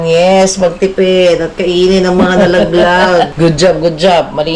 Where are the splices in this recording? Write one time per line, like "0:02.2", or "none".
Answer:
0:03.3